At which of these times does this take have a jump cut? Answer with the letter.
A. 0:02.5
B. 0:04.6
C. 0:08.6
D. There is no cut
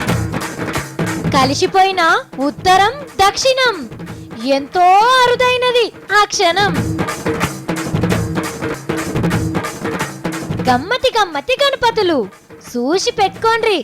C